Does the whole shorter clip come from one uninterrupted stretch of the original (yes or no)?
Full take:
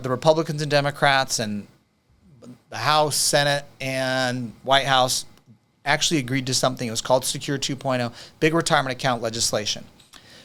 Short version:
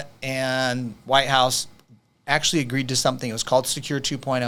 yes